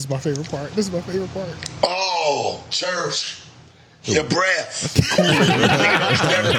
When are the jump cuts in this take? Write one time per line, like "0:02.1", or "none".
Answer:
none